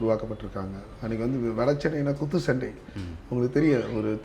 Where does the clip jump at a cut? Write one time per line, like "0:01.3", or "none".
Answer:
none